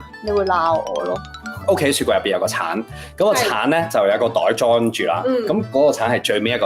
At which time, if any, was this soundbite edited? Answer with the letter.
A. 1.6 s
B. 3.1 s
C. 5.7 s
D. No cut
A